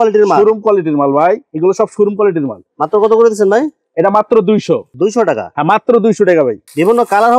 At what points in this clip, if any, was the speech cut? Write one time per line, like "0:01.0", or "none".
none